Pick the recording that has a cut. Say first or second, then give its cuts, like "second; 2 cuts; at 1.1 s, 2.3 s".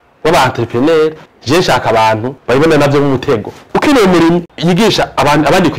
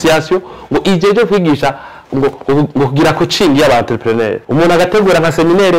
first; 2 cuts; at 3.7 s, 4.5 s